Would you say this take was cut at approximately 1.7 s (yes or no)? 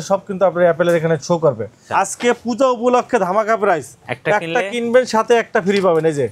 yes